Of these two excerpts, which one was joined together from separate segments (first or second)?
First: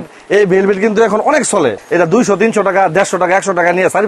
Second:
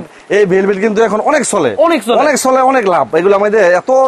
first